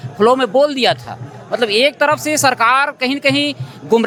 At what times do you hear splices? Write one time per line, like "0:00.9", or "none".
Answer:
none